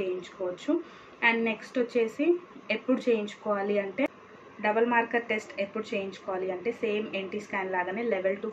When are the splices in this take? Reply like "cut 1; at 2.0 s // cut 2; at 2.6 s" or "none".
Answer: none